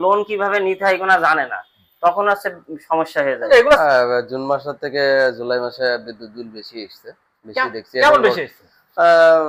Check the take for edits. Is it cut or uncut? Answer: uncut